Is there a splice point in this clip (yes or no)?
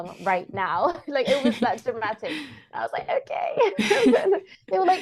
no